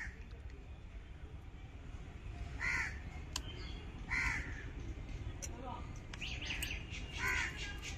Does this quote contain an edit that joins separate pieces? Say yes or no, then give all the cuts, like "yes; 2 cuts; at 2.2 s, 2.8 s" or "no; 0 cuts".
no; 0 cuts